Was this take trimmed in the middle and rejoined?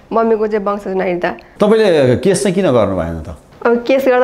yes; 1 cut; at 1.4 s

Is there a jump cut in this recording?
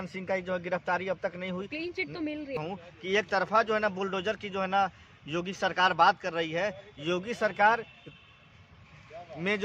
yes; 1 cut; at 2.6 s

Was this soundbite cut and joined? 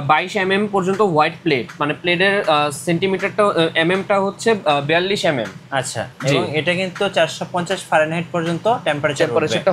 no; 0 cuts

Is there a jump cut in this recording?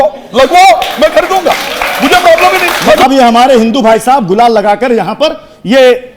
yes; 1 cut; at 3.0 s

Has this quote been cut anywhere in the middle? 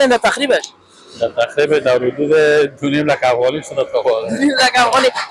no; 0 cuts

